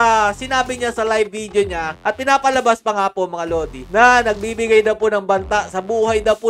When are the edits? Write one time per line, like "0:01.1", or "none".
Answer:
0:01.9